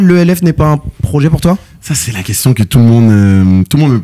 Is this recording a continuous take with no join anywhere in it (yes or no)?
yes